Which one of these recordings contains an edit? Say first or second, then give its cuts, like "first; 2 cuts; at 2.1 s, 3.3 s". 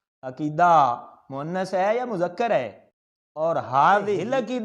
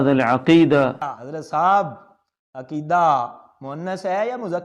second; 1 cut; at 0.9 s